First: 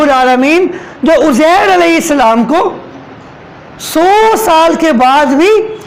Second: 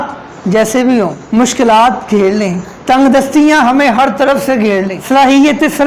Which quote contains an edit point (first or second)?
second